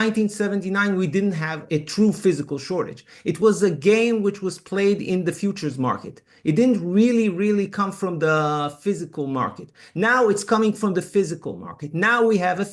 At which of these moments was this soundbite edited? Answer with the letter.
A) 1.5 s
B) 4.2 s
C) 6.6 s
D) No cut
A